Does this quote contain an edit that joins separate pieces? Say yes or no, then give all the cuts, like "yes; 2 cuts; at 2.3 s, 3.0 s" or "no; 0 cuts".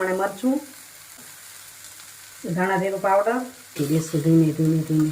yes; 2 cuts; at 1.2 s, 3.8 s